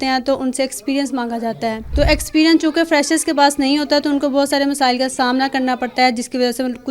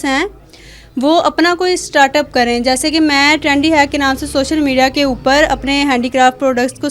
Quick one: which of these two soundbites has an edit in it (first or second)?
first